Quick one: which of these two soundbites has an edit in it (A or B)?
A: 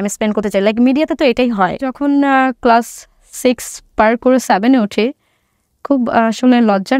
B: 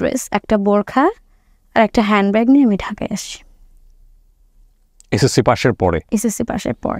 A